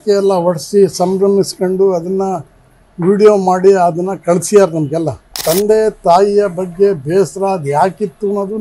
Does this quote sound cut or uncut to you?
cut